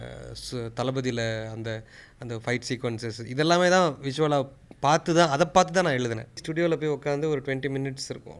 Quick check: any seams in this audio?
yes; 1 cut; at 6.4 s

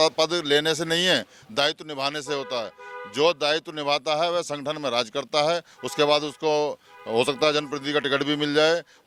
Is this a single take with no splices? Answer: yes; 0 cuts

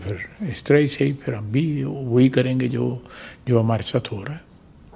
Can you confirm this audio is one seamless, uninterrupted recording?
yes; 0 cuts

